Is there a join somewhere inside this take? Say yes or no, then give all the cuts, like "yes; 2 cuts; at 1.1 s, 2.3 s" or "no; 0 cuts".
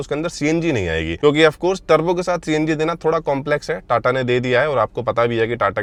no; 0 cuts